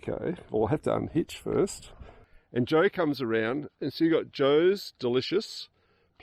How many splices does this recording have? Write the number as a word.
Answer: one